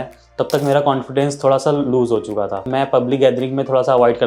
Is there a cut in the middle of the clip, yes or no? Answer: yes